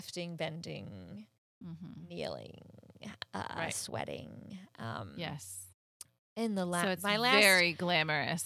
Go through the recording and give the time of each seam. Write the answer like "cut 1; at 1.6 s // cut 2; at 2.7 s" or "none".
none